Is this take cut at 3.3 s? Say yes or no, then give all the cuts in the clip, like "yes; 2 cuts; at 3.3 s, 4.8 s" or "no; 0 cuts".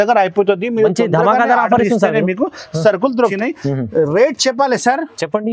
yes; 1 cut; at 3.3 s